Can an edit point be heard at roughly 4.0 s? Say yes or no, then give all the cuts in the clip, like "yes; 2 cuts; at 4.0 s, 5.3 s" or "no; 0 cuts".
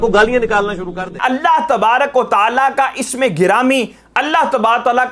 no; 1 cut; at 1.1 s